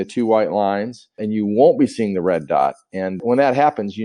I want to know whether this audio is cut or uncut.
cut